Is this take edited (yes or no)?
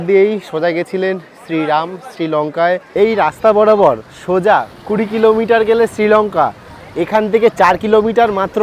yes